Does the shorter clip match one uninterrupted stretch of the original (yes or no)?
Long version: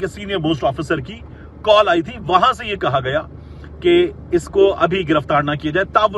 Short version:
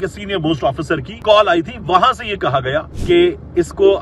no